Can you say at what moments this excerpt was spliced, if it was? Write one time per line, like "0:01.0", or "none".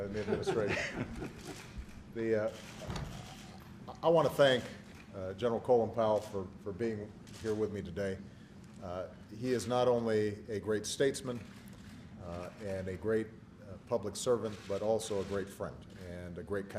0:10.6